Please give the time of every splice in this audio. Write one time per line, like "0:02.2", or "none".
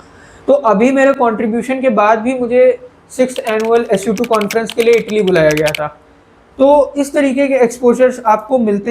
none